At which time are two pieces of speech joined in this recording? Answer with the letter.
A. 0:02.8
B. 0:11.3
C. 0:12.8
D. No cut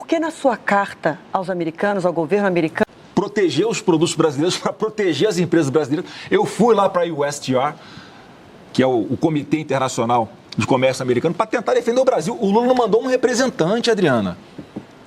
A